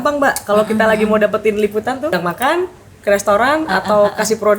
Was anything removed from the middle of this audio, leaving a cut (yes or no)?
yes